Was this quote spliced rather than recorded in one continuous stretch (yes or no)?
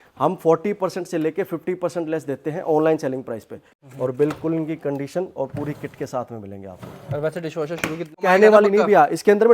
yes